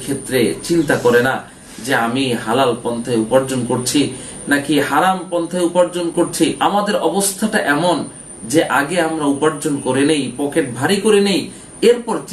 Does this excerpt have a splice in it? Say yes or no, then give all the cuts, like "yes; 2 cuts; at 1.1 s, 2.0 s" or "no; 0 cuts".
no; 0 cuts